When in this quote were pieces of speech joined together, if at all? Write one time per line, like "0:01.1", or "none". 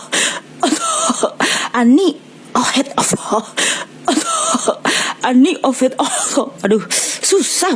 0:01.6